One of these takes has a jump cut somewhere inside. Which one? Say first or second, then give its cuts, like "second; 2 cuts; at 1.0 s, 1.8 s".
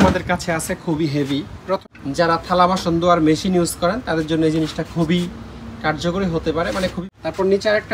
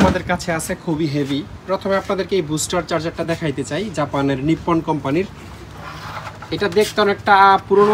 first; 2 cuts; at 1.8 s, 7.0 s